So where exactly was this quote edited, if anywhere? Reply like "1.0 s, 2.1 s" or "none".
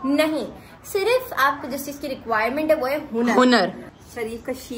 3.8 s